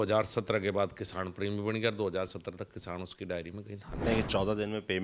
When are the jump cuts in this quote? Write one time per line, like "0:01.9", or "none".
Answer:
0:04.0